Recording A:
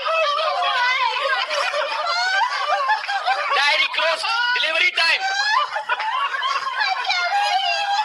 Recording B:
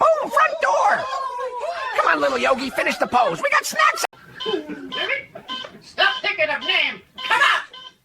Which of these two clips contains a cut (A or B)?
B